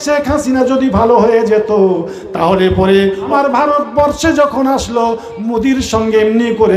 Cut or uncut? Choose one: cut